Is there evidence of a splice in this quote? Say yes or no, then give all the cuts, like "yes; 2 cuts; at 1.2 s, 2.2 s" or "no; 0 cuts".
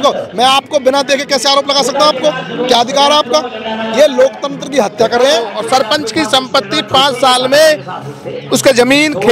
yes; 1 cut; at 5.6 s